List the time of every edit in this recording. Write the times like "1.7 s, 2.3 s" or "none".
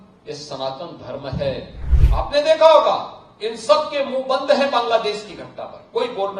1.8 s